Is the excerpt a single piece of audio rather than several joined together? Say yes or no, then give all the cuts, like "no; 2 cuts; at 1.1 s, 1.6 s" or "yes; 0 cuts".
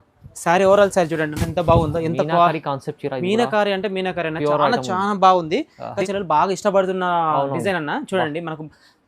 no; 1 cut; at 5.9 s